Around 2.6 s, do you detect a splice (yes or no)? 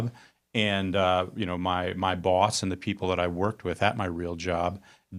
no